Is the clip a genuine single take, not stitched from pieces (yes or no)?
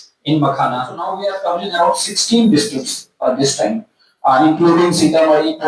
no